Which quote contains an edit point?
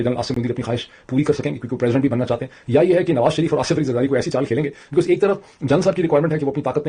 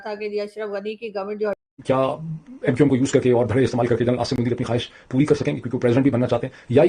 second; 1 cut; at 1.6 s

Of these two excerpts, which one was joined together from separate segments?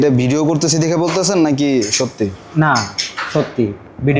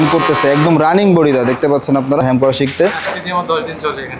second; 1 cut; at 2.2 s

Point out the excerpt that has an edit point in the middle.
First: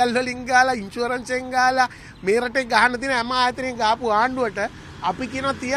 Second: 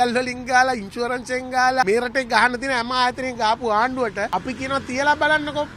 second; 2 cuts; at 1.8 s, 4.3 s

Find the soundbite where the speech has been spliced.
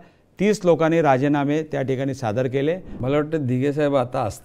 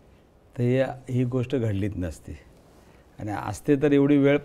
first; 1 cut; at 2.9 s

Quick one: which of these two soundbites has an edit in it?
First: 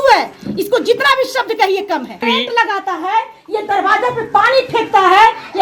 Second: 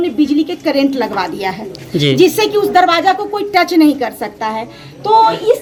first; 1 cut; at 2.2 s

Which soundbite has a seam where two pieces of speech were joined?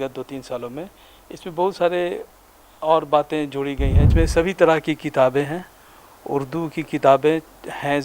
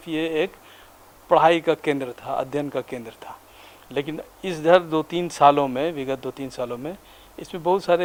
first; 1 cut; at 4.0 s

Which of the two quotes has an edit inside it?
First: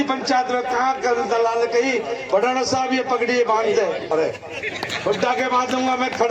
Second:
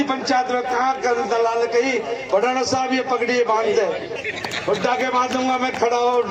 second; 1 cut; at 4.0 s

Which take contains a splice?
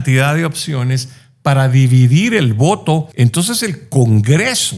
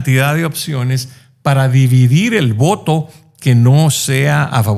first; 1 cut; at 3.1 s

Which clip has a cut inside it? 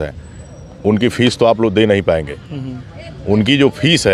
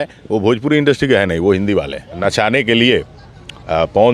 second; 1 cut; at 2.0 s

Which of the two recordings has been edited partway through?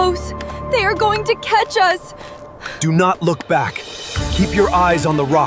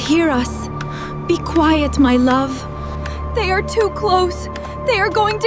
second; 1 cut; at 2.9 s

